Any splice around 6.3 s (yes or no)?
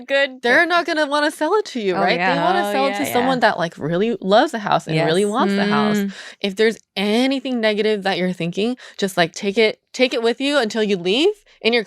yes